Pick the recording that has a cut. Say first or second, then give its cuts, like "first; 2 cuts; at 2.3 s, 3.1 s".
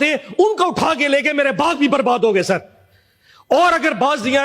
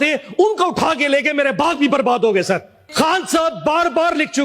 second; 1 cut; at 2.8 s